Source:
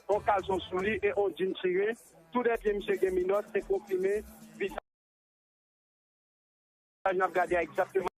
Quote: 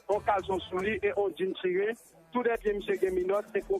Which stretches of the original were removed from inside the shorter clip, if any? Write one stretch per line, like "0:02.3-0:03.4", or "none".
none